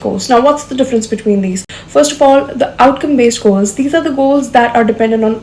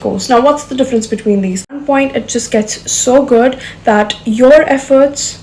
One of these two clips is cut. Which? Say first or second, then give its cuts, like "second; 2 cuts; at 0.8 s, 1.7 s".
second; 1 cut; at 1.8 s